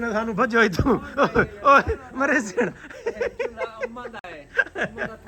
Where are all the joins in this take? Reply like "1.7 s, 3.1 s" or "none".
none

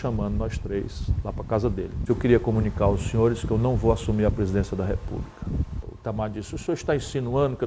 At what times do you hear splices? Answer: 2.0 s, 5.8 s

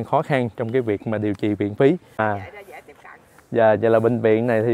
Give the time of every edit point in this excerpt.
2.2 s

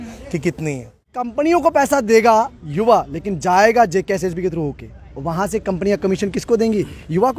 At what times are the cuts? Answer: 1.3 s

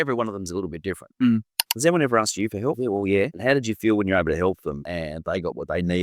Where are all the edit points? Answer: 1.7 s, 3.2 s, 4.9 s

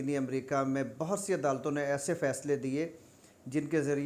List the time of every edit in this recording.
none

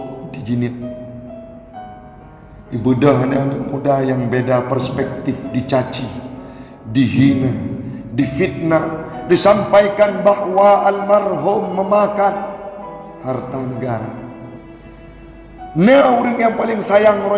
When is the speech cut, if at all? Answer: 14.6 s

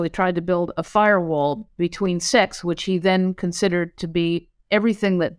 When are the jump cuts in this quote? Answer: 1.7 s

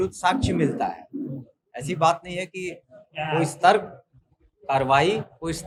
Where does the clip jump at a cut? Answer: none

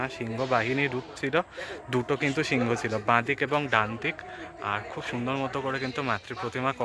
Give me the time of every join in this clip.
none

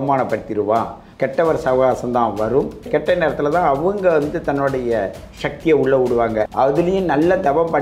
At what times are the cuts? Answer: 1.0 s, 2.9 s, 6.5 s

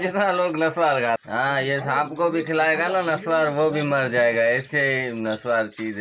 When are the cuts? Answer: 1.2 s

